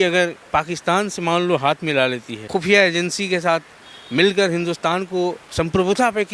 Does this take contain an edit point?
yes; 2 cuts; at 2.3 s, 5.4 s

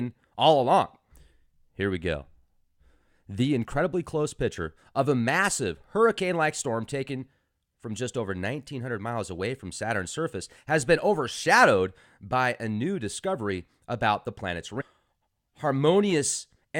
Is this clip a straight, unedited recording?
yes; 0 cuts

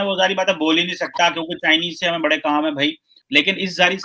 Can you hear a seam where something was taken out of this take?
yes; 1 cut; at 3.1 s

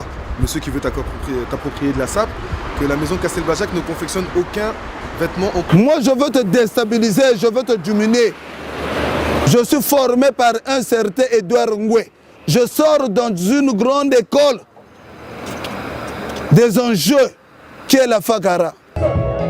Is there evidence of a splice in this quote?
no; 0 cuts

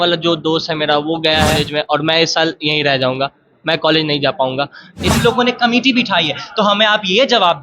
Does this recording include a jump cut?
yes; 2 cuts; at 1.6 s, 5.1 s

